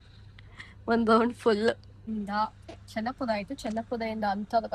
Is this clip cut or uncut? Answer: cut